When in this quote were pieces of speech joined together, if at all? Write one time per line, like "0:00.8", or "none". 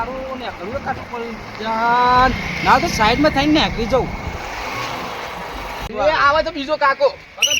0:05.9